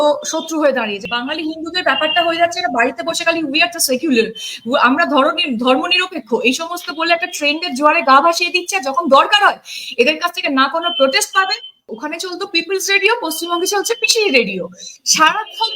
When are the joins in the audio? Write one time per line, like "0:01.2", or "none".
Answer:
0:01.0
0:11.9

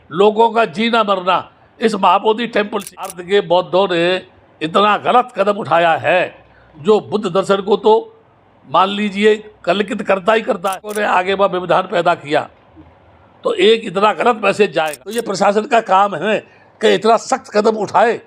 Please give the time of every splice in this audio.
0:03.1
0:10.9
0:15.1

